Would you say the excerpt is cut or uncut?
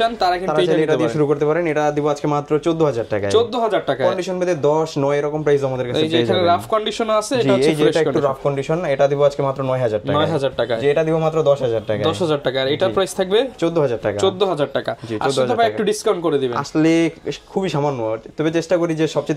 uncut